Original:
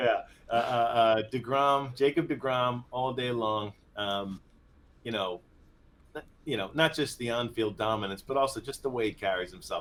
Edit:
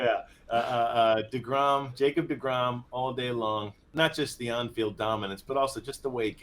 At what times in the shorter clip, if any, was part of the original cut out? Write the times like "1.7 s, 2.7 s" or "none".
3.9 s